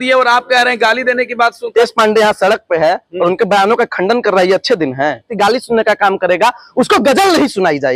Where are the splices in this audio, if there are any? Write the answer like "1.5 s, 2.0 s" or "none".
1.7 s, 5.3 s